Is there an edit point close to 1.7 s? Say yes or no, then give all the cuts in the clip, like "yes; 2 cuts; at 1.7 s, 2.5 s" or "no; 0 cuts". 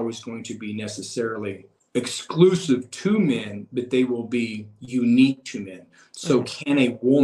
yes; 1 cut; at 1.7 s